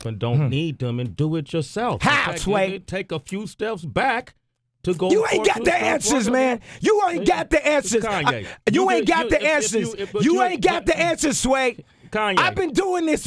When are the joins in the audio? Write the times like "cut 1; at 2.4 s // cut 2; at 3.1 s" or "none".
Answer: cut 1; at 2.8 s